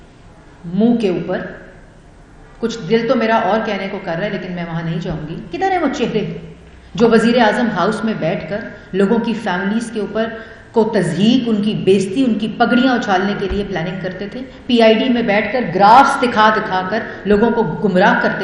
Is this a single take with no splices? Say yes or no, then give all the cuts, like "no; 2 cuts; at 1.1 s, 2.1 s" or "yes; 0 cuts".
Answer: no; 1 cut; at 5.4 s